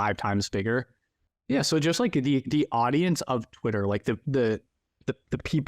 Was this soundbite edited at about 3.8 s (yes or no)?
no